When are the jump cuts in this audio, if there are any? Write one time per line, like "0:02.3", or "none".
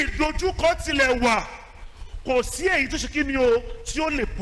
none